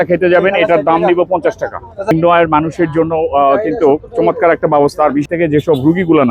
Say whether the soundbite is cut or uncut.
cut